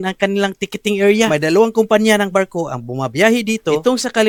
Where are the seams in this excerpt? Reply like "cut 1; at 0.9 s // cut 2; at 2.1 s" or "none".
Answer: none